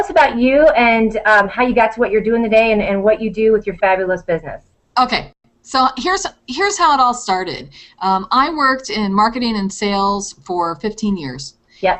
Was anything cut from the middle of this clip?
yes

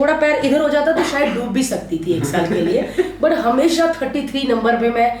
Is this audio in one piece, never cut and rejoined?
yes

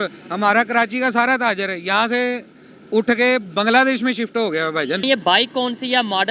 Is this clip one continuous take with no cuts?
no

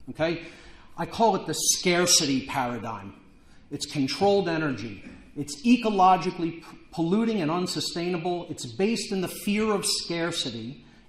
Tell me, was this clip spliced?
yes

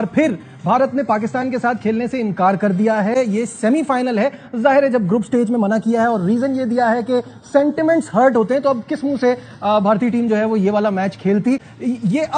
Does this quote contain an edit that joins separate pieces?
no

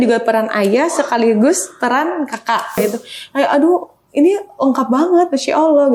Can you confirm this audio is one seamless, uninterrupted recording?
no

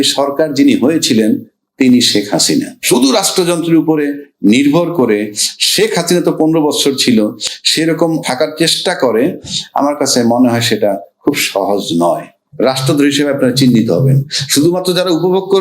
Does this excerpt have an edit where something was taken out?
yes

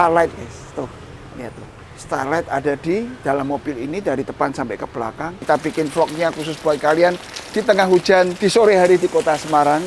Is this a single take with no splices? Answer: no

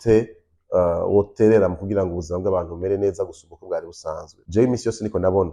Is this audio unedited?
no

